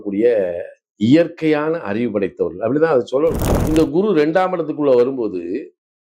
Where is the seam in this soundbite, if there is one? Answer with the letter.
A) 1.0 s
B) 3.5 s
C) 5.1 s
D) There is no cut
B